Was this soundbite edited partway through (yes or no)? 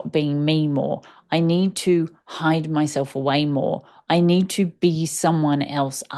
no